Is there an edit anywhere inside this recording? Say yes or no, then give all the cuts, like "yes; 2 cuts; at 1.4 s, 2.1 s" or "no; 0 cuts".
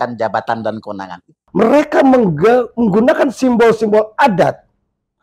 yes; 1 cut; at 1.4 s